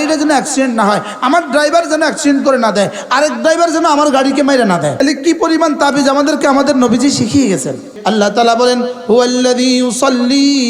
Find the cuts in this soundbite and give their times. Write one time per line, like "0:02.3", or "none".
0:04.9
0:07.9